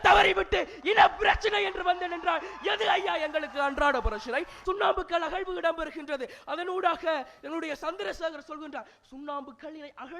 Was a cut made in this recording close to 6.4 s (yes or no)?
no